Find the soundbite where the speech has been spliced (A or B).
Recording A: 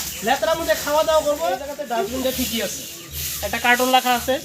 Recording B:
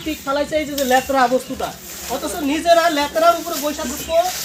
A